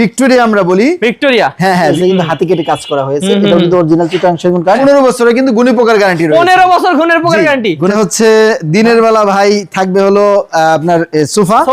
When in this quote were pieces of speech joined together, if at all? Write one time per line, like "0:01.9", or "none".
0:02.0
0:04.8
0:07.9